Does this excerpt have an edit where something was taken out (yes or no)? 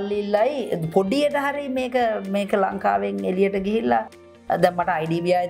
no